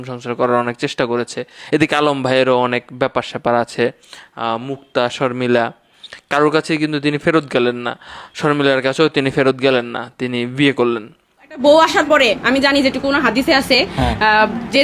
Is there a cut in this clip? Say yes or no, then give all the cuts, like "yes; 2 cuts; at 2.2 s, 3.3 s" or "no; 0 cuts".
yes; 1 cut; at 11.6 s